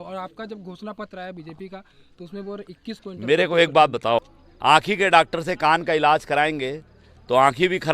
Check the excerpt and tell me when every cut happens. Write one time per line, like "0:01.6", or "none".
0:04.2